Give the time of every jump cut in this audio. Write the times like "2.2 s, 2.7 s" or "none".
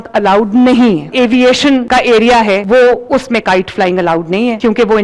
1.1 s